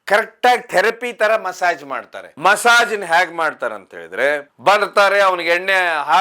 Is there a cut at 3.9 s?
no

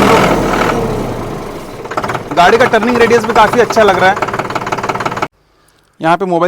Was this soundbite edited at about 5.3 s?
yes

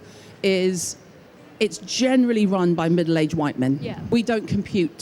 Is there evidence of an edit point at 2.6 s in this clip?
no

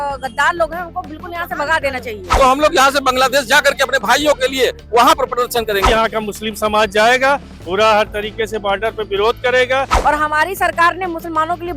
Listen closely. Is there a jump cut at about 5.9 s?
yes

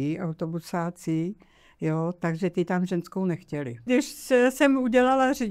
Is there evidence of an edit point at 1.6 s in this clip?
no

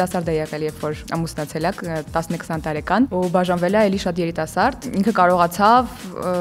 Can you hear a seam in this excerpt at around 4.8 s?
yes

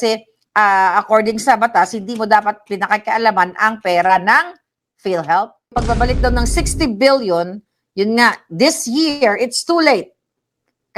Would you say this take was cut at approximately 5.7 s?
yes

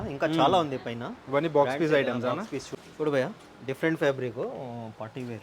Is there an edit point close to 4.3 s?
no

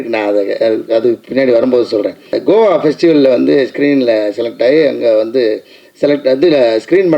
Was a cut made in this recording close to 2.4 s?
yes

